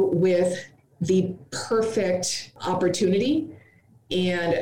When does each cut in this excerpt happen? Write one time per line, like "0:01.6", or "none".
none